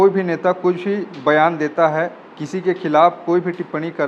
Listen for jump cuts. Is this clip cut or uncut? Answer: uncut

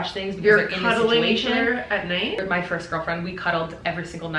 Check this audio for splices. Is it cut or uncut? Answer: cut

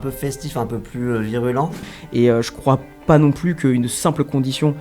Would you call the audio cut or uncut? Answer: cut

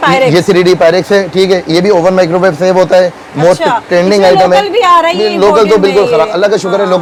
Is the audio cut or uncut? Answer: uncut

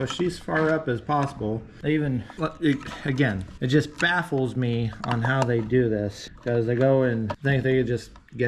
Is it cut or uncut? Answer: cut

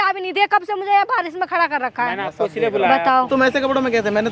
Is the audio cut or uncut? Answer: cut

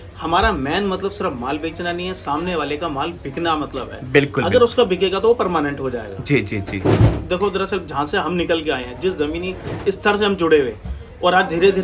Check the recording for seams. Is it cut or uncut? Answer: uncut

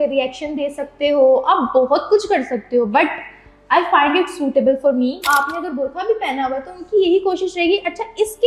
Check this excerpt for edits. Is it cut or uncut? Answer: cut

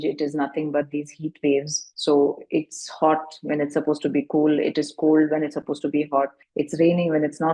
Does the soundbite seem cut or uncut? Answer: uncut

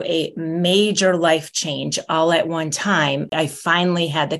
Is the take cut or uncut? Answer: cut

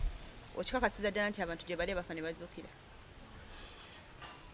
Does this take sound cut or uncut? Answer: uncut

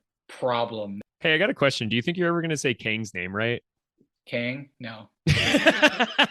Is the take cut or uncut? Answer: cut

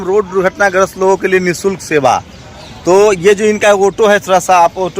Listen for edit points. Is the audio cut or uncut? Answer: uncut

